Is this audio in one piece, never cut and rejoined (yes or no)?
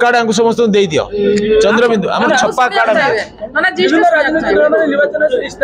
yes